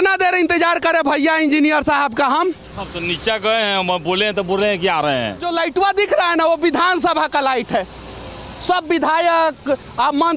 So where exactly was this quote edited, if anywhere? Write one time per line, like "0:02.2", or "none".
0:05.4